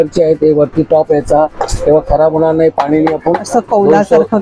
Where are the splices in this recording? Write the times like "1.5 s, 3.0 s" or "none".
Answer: none